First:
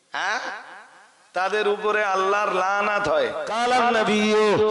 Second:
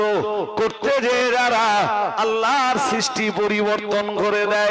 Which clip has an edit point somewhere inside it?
first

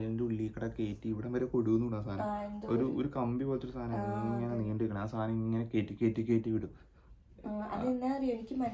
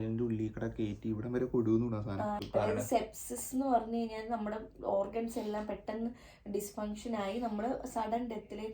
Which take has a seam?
second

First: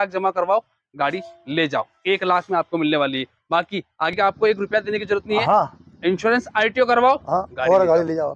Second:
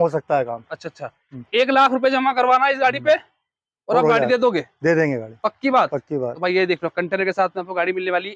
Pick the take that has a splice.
first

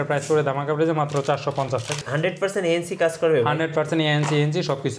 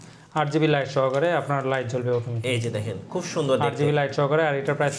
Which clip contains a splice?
first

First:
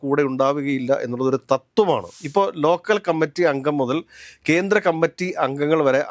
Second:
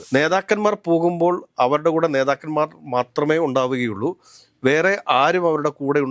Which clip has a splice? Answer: first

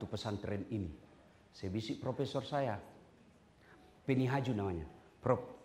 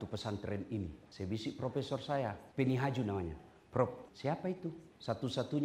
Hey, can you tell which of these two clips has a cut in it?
second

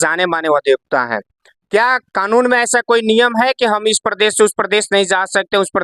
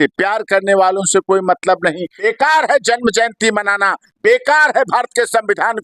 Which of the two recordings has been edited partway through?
second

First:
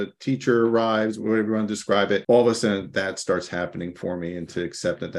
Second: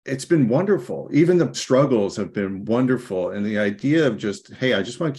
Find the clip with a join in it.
first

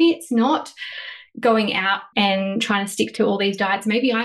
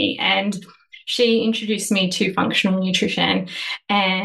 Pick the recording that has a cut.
first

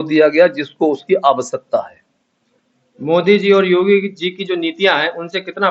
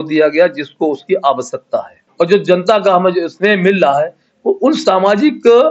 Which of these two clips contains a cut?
second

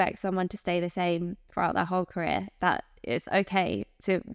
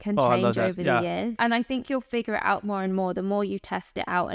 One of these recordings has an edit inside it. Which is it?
second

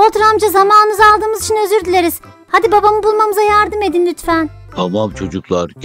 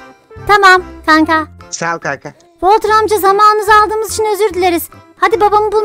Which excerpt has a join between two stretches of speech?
first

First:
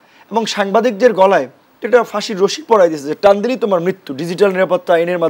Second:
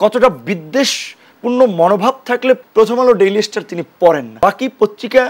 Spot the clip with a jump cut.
second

